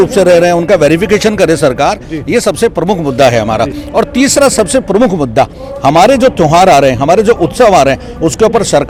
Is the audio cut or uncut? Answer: uncut